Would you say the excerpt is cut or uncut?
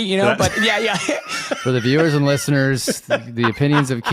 cut